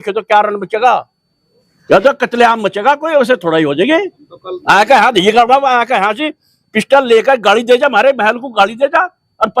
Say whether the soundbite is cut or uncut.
uncut